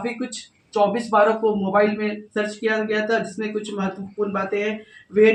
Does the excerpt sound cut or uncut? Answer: uncut